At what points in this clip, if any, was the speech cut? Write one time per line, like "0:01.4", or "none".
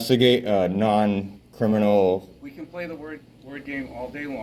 none